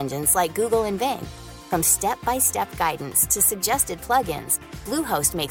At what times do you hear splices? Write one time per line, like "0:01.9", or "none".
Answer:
none